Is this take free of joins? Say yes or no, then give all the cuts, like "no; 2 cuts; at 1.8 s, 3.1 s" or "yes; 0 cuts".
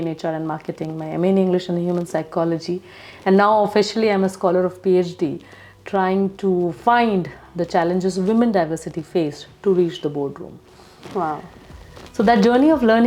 yes; 0 cuts